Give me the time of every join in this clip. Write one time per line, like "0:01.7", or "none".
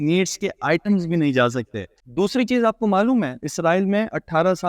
0:01.9